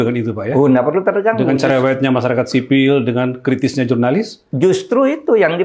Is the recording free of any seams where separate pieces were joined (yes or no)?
yes